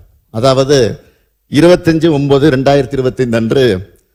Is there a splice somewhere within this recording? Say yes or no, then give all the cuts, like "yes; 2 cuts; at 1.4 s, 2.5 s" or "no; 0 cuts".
no; 0 cuts